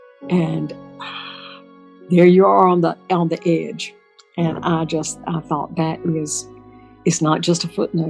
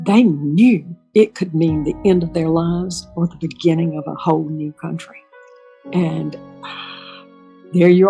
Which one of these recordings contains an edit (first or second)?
second